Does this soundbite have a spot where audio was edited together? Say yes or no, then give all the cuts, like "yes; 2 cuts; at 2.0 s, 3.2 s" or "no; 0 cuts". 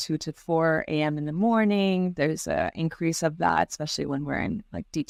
no; 0 cuts